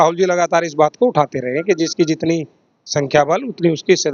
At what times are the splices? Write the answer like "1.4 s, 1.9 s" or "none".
none